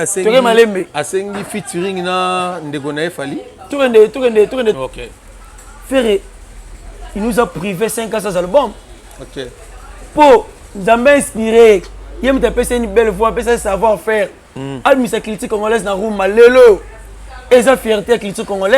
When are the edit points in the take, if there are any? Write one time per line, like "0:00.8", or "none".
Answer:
0:04.8